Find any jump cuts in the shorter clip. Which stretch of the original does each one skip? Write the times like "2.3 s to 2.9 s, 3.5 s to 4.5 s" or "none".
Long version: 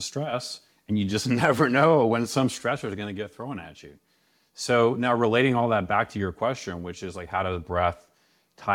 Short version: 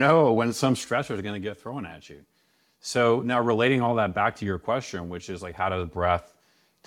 none